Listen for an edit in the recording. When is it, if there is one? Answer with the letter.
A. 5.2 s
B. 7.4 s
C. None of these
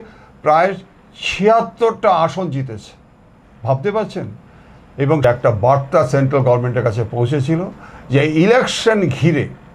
A